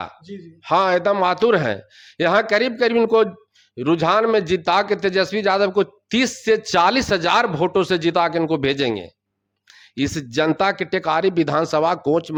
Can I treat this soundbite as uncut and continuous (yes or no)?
yes